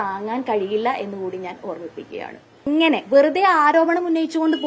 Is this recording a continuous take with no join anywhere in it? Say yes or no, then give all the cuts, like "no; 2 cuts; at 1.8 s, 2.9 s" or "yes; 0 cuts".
no; 1 cut; at 2.7 s